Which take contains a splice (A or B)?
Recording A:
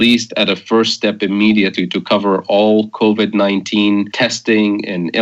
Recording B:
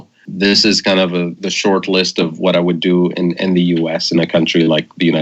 A